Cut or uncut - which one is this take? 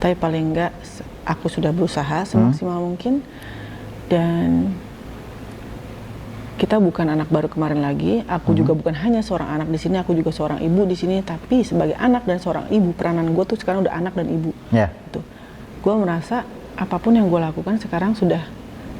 uncut